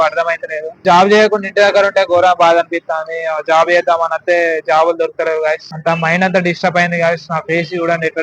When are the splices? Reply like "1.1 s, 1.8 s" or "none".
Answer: 0.8 s, 5.7 s